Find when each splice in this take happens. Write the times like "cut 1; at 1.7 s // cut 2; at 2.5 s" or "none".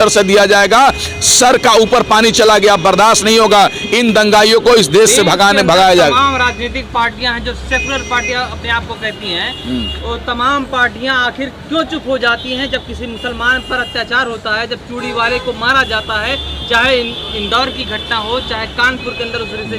none